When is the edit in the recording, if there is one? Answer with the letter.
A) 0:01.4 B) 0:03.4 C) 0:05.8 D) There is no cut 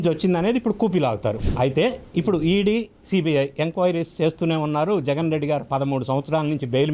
A